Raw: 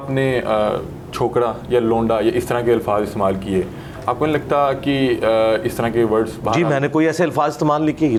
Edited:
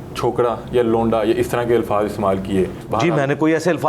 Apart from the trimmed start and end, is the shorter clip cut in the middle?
yes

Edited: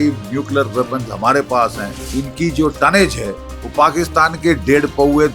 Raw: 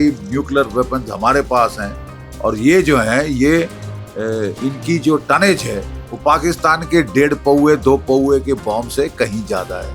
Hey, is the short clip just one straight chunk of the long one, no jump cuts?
no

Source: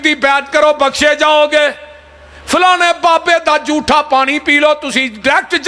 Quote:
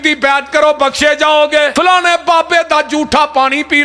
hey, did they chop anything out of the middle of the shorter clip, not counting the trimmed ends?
yes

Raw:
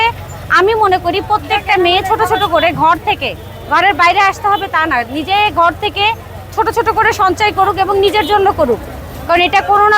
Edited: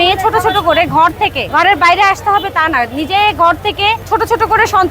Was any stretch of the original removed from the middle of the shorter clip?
yes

